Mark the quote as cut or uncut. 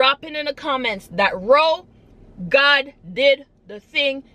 uncut